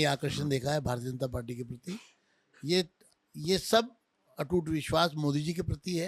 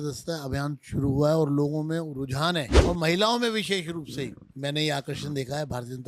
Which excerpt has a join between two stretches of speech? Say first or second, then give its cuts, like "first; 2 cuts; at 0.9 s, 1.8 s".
second; 1 cut; at 2.7 s